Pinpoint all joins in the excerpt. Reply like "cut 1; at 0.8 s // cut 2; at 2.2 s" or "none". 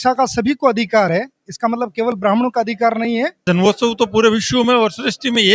cut 1; at 3.5 s